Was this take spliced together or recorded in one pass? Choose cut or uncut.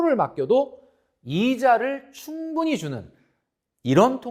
uncut